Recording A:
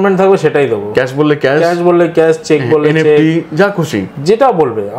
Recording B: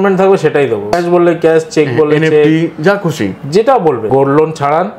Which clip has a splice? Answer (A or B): B